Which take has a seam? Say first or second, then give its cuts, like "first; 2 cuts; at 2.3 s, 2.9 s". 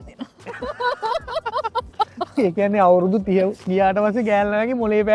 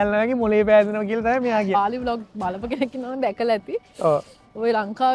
second; 1 cut; at 1.7 s